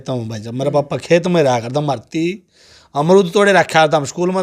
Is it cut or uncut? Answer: uncut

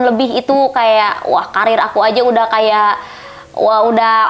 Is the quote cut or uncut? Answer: uncut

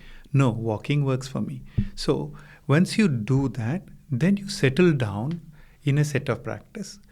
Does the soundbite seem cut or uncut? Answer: uncut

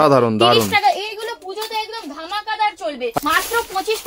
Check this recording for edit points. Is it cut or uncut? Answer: cut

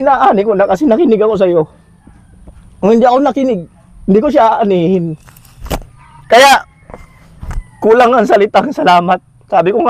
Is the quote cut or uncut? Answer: uncut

